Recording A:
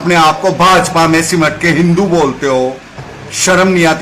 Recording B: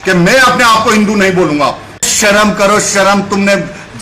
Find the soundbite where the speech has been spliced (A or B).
B